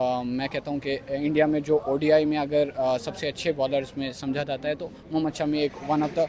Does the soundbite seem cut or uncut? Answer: uncut